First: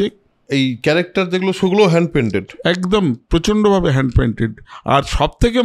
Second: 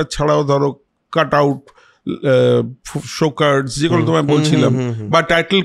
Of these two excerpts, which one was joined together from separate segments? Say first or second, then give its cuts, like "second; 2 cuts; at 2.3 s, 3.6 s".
first; 1 cut; at 4.7 s